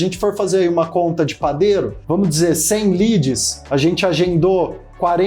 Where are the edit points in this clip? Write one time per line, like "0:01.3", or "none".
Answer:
0:02.0
0:03.5